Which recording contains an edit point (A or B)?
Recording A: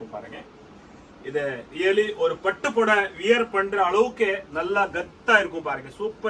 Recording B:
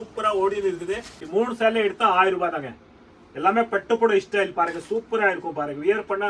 B